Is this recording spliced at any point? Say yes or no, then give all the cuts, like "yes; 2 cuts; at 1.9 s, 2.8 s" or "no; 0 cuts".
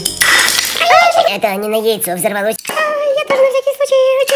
yes; 2 cuts; at 1.3 s, 2.7 s